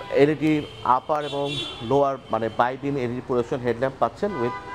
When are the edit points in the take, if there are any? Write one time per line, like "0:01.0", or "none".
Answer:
none